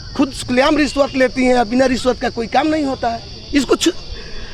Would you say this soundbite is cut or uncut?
uncut